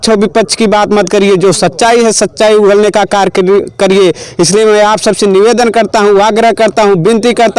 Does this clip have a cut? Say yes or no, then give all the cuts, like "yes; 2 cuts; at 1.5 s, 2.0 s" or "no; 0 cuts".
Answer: no; 0 cuts